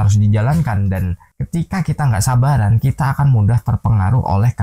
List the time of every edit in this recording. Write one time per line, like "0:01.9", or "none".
0:01.3